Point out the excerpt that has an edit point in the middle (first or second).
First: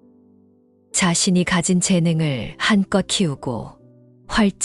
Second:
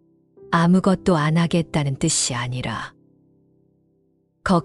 first